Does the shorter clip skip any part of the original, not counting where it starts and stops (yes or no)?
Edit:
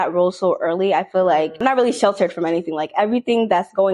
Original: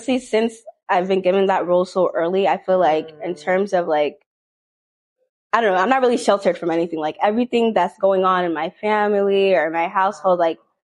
yes